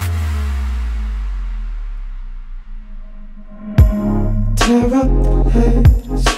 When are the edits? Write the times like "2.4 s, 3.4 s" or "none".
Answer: none